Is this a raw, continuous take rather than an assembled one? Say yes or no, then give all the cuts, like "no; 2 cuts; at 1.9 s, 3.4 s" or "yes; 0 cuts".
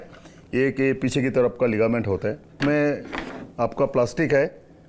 no; 1 cut; at 2.6 s